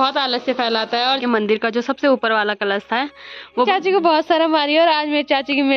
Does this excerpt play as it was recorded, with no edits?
no; 2 cuts; at 1.2 s, 3.7 s

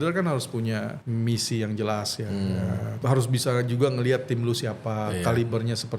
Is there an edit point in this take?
yes; 2 cuts; at 1.0 s, 3.0 s

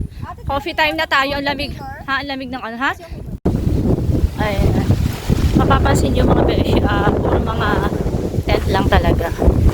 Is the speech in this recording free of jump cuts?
no; 1 cut; at 3.4 s

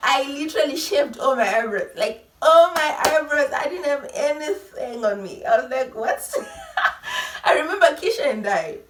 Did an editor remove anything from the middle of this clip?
no; 0 cuts

